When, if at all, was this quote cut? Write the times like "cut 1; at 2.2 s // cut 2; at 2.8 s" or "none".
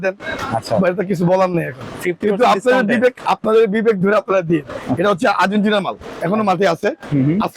cut 1; at 4.7 s